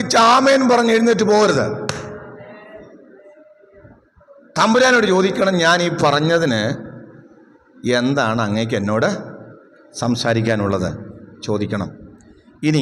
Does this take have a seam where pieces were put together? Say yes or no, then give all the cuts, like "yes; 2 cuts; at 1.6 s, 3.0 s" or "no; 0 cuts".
no; 0 cuts